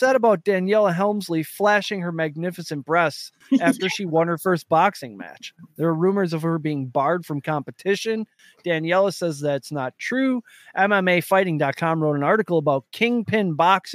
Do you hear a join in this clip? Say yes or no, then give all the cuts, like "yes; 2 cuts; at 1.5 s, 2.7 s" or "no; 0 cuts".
yes; 1 cut; at 1.5 s